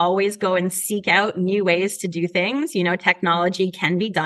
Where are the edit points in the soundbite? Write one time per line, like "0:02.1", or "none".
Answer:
none